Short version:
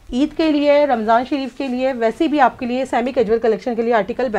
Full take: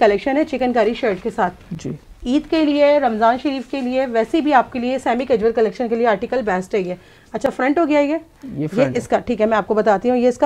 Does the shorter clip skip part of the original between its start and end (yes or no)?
no